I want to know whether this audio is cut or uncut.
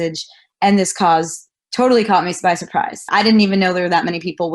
cut